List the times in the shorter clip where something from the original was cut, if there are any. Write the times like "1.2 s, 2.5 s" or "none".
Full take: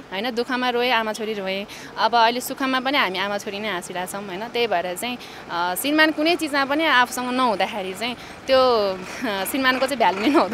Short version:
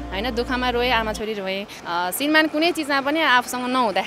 1.7 s